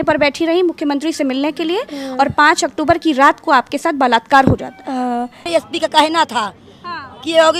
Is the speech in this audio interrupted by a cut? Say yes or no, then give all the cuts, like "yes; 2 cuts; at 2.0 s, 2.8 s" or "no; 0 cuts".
yes; 1 cut; at 5.5 s